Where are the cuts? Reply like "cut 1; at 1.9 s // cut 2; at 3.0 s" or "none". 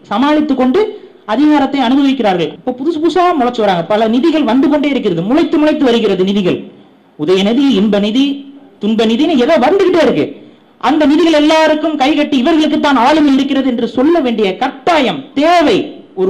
cut 1; at 2.5 s